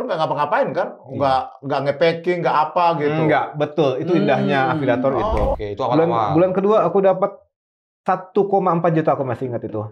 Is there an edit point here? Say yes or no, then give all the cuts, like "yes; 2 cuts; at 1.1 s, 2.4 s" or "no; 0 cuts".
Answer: yes; 1 cut; at 5.6 s